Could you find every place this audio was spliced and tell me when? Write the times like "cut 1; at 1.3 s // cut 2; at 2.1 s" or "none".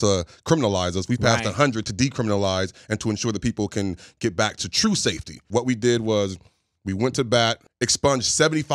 cut 1; at 5.4 s // cut 2; at 7.6 s